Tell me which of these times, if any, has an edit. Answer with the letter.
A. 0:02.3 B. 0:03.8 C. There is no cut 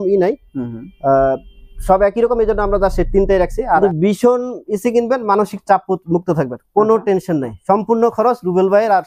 B